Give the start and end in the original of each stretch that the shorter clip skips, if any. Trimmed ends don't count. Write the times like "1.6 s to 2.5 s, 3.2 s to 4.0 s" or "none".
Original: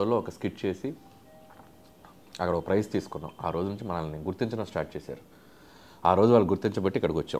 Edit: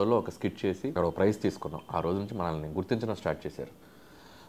1.0 s to 2.5 s